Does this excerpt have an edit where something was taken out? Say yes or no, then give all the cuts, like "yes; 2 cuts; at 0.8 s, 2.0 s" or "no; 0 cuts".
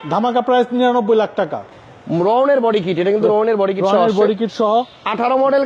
yes; 1 cut; at 1.7 s